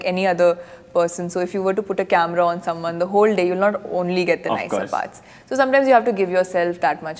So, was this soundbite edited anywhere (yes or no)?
no